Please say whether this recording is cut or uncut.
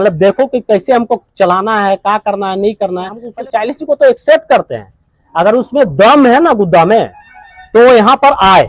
cut